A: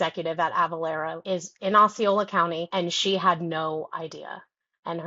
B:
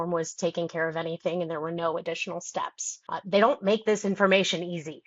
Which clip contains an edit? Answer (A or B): A